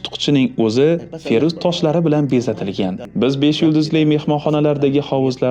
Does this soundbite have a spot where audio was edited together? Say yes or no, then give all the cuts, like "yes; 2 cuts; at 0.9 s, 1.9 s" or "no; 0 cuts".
yes; 1 cut; at 3.0 s